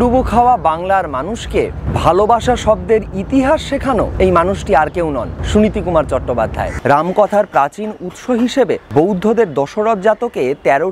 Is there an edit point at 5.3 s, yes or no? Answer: yes